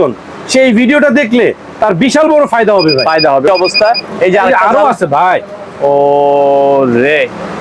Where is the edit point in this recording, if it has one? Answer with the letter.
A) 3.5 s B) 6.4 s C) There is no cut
A